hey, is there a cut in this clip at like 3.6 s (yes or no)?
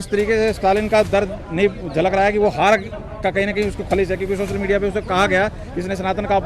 no